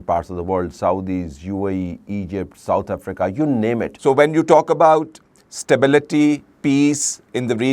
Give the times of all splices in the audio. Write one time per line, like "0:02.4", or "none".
0:03.9